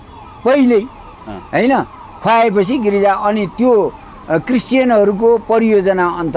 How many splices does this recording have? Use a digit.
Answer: 0